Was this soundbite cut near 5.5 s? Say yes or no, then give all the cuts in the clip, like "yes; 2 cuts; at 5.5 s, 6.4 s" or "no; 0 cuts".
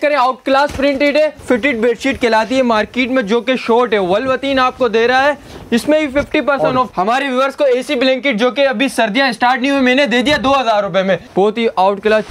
no; 3 cuts; at 1.4 s, 6.9 s, 11.3 s